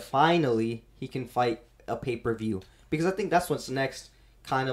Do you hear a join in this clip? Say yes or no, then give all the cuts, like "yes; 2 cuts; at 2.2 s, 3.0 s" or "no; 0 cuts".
no; 0 cuts